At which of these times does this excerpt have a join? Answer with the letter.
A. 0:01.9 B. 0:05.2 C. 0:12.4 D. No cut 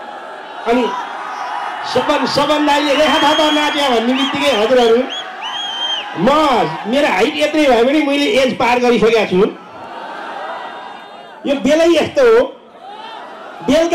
D